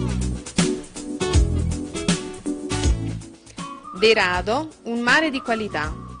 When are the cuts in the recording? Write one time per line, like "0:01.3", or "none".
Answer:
0:03.8